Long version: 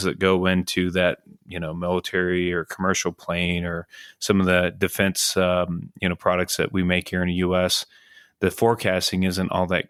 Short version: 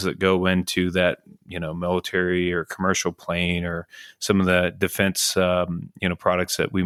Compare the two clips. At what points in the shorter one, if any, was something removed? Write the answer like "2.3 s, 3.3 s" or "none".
none